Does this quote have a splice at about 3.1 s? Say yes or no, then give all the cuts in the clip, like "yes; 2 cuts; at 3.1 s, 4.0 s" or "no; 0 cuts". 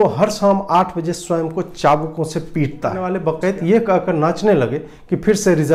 yes; 1 cut; at 3.1 s